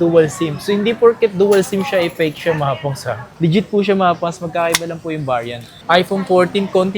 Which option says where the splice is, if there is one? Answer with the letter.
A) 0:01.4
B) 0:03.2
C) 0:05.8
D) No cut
C